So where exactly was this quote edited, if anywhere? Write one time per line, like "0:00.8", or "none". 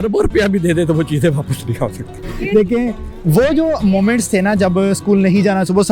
0:02.3